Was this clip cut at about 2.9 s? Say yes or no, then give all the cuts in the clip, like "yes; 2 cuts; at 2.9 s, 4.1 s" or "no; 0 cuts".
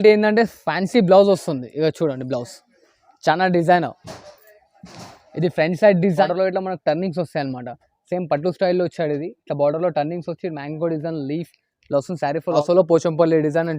no; 2 cuts; at 6.1 s, 12.6 s